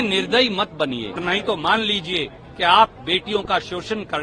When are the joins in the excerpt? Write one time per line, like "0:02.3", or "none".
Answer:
0:01.2